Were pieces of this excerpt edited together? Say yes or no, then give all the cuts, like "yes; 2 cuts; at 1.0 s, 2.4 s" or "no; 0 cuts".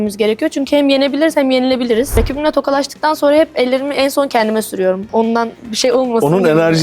yes; 1 cut; at 2.1 s